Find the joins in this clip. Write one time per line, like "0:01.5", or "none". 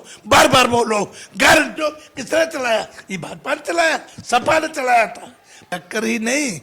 0:01.8
0:05.6